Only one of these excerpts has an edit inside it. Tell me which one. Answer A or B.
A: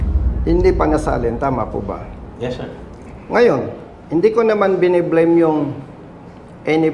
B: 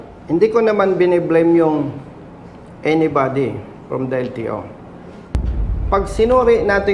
B